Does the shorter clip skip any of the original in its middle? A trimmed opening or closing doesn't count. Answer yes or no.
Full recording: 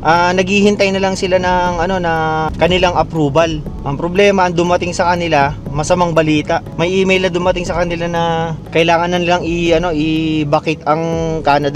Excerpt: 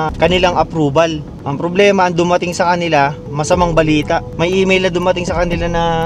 no